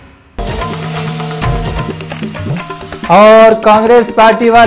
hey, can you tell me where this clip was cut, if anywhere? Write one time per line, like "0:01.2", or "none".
0:00.9